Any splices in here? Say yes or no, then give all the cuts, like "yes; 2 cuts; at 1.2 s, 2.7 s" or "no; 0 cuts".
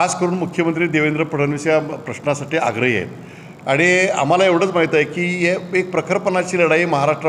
no; 0 cuts